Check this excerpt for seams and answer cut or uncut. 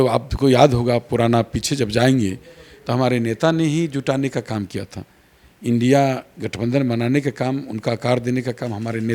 uncut